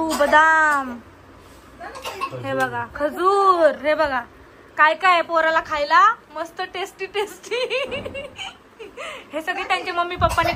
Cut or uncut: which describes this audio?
uncut